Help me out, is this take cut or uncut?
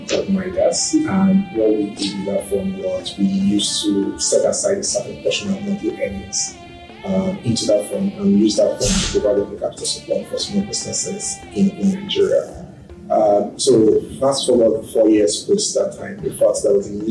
uncut